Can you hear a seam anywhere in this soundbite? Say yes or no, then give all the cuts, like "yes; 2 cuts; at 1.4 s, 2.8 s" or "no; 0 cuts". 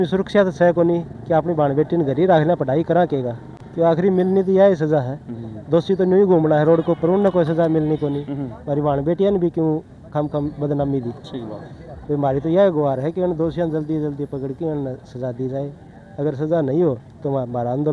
no; 0 cuts